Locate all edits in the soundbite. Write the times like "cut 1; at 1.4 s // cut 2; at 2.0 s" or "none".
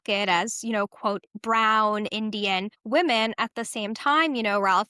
cut 1; at 1.3 s // cut 2; at 2.7 s